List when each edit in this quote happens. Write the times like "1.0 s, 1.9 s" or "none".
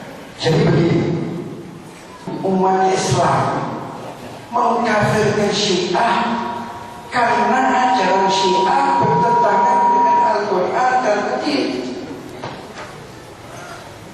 3.8 s